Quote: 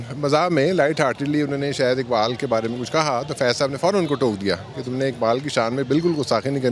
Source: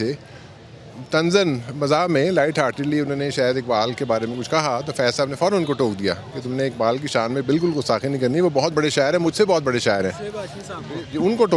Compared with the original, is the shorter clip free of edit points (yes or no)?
yes